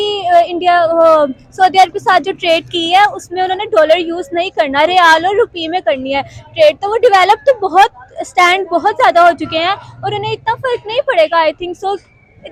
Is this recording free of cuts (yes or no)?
yes